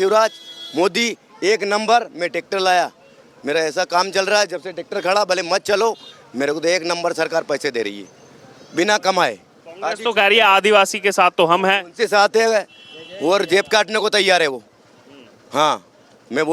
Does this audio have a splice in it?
no; 0 cuts

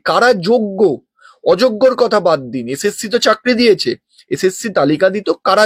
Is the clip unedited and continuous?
yes; 0 cuts

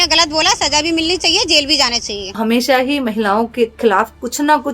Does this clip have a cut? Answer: yes; 1 cut; at 2.3 s

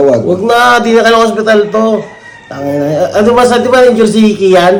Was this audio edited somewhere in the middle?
no; 0 cuts

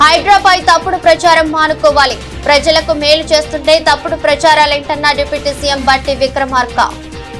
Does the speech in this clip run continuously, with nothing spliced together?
yes; 0 cuts

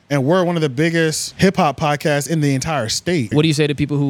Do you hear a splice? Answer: yes; 2 cuts; at 1.2 s, 3.3 s

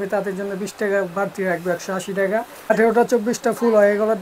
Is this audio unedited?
no; 1 cut; at 2.7 s

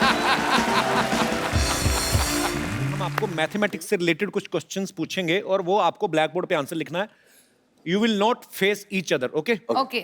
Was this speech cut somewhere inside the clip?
yes; 1 cut; at 3.1 s

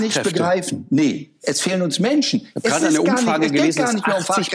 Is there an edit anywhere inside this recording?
no; 0 cuts

